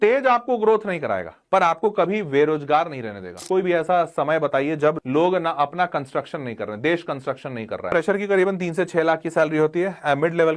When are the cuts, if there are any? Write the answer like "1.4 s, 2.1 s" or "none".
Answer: 3.4 s, 5.0 s, 7.9 s